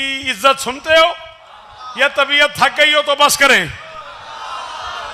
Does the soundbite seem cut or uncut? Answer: uncut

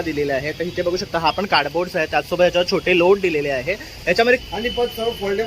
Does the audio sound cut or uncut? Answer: cut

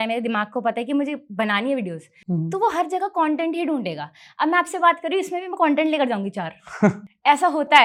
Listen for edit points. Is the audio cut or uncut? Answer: uncut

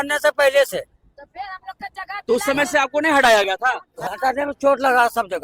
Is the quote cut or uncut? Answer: cut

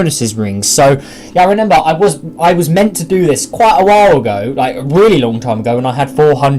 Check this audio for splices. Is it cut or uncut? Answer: cut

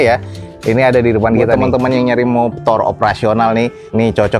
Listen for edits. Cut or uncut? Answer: cut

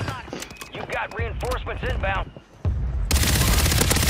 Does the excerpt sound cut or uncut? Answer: cut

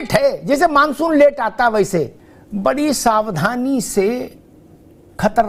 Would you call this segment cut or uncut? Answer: uncut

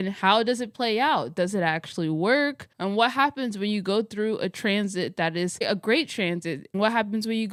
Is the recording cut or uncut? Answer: uncut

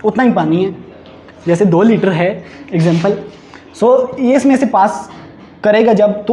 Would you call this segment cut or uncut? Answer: uncut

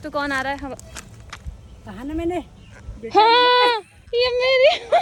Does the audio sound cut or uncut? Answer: uncut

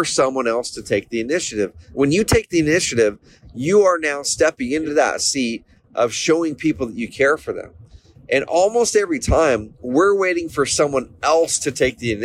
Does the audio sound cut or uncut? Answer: cut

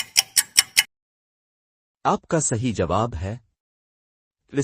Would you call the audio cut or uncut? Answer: cut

